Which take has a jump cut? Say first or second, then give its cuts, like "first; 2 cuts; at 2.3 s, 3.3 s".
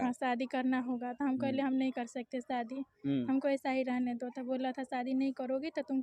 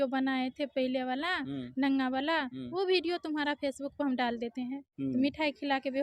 second; 1 cut; at 4.8 s